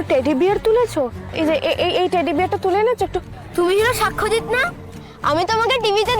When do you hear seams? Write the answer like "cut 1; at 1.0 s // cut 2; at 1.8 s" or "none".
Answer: cut 1; at 1.3 s // cut 2; at 3.4 s